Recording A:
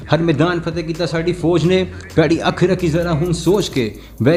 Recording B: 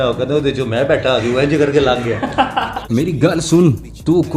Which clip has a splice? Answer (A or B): B